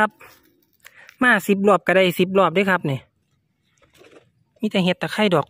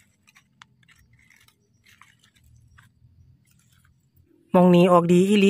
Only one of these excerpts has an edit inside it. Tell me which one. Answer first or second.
second